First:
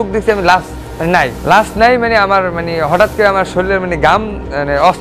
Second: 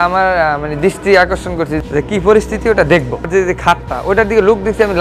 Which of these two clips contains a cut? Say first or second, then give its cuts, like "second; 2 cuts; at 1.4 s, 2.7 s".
second; 2 cuts; at 1.7 s, 3.3 s